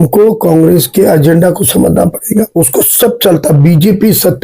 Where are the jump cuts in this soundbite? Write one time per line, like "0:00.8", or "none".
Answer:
0:02.5